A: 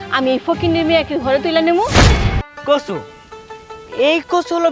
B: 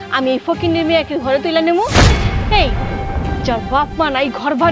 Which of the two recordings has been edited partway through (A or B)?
A